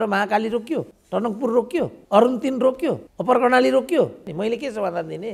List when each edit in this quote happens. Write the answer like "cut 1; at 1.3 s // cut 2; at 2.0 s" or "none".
cut 1; at 1.0 s // cut 2; at 2.0 s // cut 3; at 3.1 s // cut 4; at 4.2 s

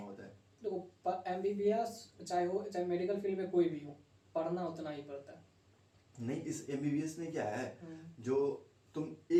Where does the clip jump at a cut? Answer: none

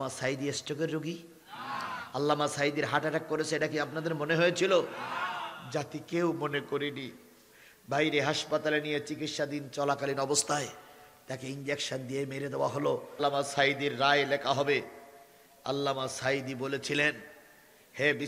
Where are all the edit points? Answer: cut 1; at 13.2 s

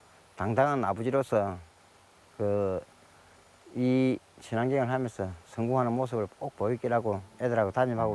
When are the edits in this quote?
none

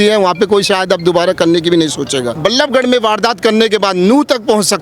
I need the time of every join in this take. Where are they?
cut 1; at 2.4 s

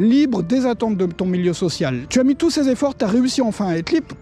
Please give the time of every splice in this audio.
cut 1; at 2.0 s

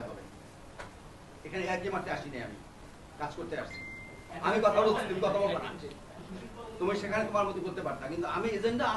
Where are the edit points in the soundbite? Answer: cut 1; at 4.3 s

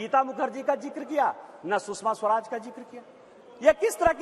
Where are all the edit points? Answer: none

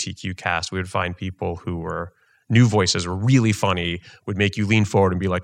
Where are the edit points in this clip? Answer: none

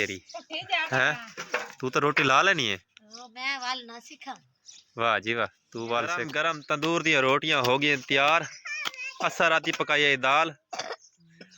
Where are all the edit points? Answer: cut 1; at 6.3 s

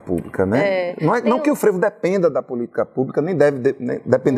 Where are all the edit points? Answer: none

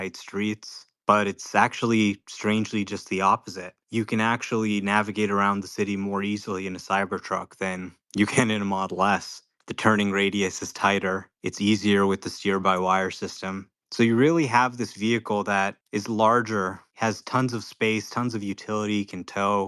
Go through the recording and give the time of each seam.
none

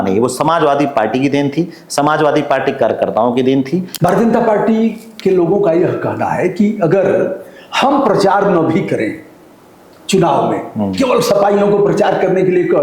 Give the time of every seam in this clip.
cut 1; at 3.9 s

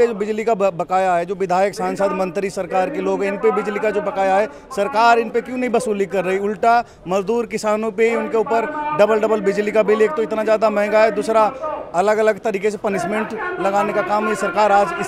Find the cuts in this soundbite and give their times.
none

